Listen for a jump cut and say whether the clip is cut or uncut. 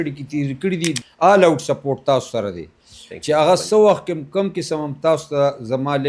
cut